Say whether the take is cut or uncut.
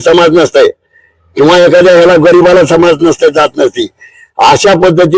uncut